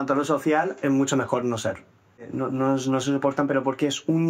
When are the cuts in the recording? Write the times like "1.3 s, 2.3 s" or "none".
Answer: 2.2 s